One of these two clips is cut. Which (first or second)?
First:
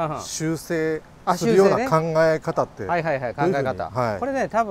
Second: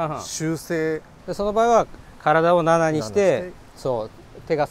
second